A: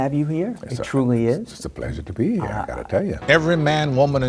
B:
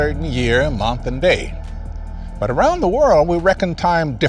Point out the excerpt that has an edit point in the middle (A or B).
A